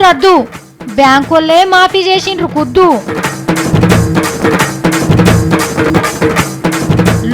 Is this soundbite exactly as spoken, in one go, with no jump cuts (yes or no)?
no